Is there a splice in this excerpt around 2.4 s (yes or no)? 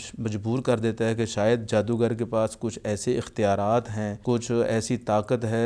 no